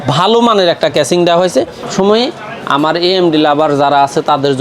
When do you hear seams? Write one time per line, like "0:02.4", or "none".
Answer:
0:01.9